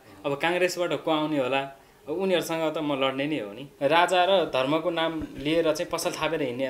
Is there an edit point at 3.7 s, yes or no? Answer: yes